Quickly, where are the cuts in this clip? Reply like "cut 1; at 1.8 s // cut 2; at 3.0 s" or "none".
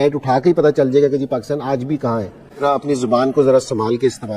cut 1; at 2.6 s